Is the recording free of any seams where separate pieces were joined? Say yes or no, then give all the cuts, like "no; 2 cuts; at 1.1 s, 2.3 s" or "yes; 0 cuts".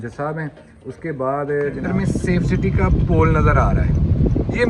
no; 1 cut; at 1.8 s